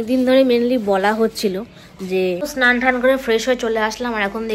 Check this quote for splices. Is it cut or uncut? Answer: cut